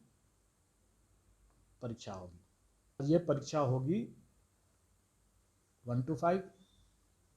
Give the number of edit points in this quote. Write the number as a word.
one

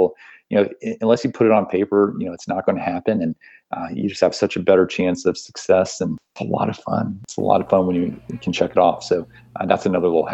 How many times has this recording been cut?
two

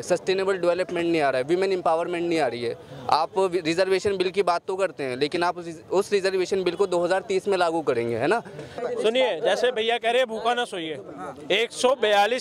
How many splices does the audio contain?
one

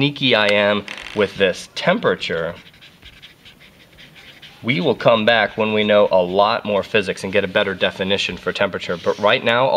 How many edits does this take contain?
one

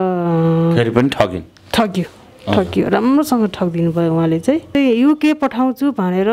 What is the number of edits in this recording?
one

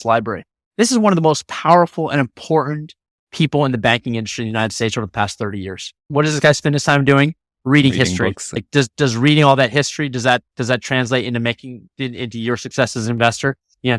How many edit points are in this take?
two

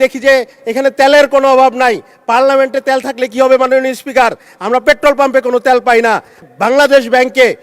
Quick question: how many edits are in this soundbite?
one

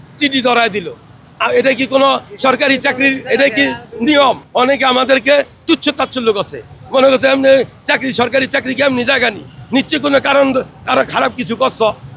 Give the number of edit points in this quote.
one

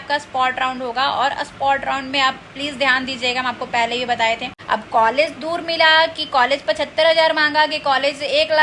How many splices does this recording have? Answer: one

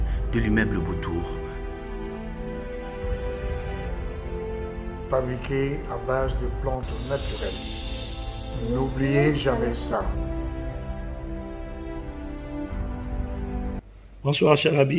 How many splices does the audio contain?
one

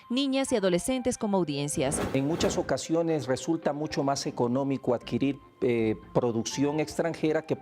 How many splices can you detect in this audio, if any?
one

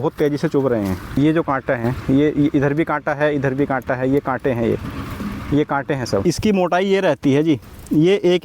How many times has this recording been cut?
two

